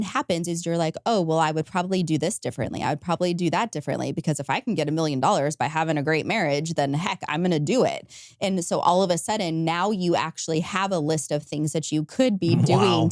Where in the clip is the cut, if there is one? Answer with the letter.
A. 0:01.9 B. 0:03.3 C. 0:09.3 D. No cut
D